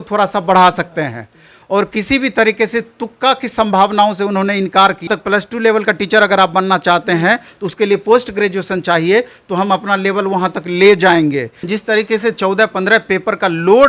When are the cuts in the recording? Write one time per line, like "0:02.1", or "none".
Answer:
0:05.1
0:11.7